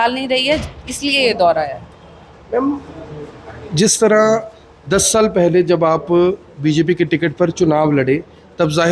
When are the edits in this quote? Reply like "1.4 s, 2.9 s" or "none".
none